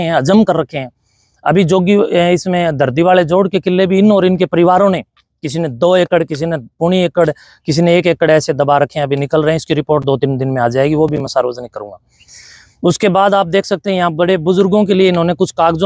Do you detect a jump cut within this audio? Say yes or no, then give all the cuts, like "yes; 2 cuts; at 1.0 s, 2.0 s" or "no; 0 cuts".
no; 0 cuts